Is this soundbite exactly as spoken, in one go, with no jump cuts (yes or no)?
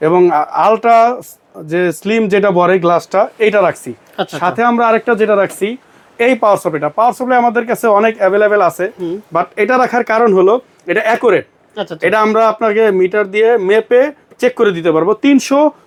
yes